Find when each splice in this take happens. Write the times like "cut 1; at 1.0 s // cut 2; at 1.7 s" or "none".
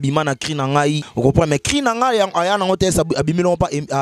cut 1; at 1.1 s